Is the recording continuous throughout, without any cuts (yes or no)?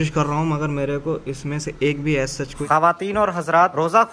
no